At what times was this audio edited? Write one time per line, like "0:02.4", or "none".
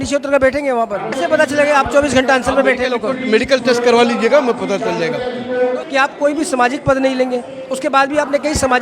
0:01.1
0:05.8